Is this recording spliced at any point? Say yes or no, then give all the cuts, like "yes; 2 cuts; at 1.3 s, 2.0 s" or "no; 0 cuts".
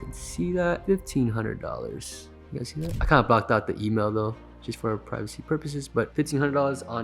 yes; 3 cuts; at 0.8 s, 3.0 s, 6.1 s